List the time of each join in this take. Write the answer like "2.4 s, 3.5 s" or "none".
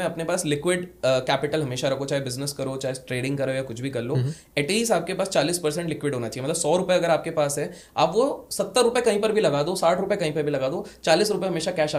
none

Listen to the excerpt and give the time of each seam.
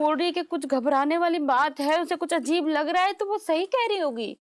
none

